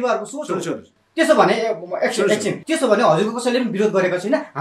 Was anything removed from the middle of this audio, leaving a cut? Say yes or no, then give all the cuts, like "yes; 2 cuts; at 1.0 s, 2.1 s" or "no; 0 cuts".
yes; 1 cut; at 2.6 s